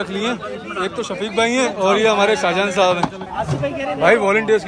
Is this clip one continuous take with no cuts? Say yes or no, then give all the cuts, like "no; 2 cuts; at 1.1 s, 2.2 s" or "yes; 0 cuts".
no; 2 cuts; at 1.7 s, 3.2 s